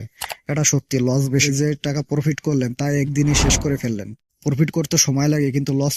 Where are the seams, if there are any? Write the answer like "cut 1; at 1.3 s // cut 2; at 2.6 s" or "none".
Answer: cut 1; at 1.4 s